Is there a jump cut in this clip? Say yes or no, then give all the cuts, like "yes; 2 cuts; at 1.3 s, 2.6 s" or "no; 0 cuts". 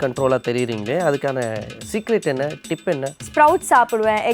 yes; 1 cut; at 3.2 s